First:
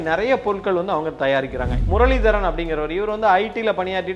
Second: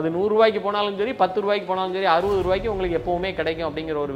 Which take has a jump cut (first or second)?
first